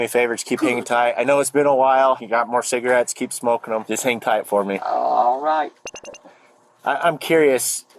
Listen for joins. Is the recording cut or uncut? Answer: cut